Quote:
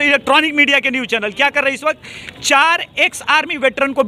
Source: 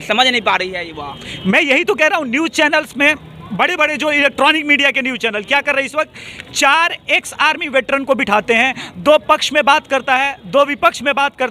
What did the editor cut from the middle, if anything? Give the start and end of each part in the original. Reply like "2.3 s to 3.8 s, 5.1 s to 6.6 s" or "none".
none

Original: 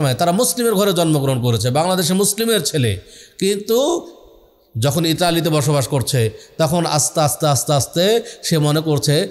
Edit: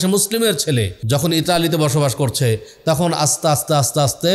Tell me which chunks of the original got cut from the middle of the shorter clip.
3.0 s to 4.7 s

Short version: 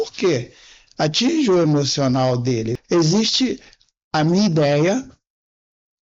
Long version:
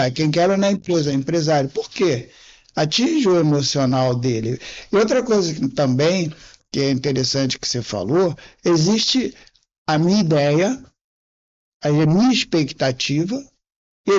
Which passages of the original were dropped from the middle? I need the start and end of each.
4.5 s to 8.5 s

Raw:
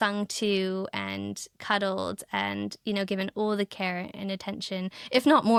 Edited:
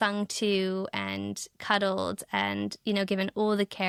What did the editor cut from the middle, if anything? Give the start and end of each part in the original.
none

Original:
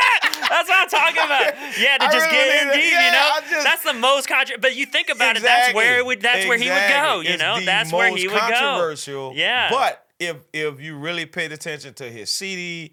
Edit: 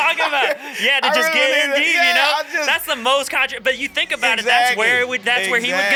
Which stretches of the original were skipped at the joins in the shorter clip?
none

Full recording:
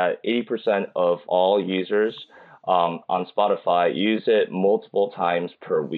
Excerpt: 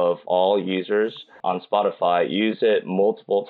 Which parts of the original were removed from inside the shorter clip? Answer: 2.4 s to 3.0 s

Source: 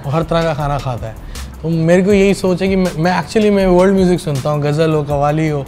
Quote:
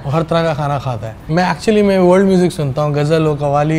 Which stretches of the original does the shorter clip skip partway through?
1.3 s to 2.9 s

